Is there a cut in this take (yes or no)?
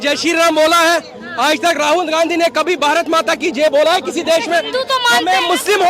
no